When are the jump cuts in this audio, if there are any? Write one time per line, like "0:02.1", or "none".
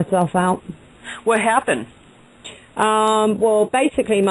0:02.6